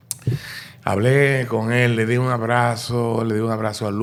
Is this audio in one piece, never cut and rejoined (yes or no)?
yes